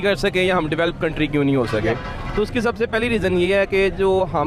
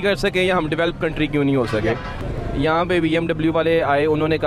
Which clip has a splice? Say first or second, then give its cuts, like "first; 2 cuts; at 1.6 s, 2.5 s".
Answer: second; 1 cut; at 2.2 s